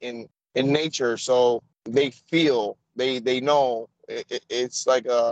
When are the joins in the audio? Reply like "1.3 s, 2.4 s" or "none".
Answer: 1.7 s